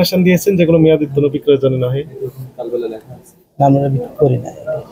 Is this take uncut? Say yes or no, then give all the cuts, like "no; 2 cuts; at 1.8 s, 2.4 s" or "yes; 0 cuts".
yes; 0 cuts